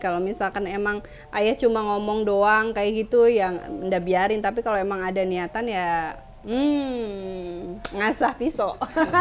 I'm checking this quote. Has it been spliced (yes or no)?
no